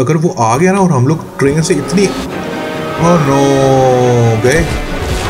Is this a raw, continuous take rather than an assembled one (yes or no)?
yes